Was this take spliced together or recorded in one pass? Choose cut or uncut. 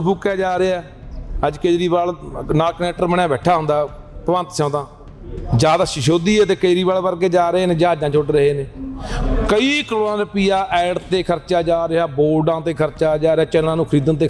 uncut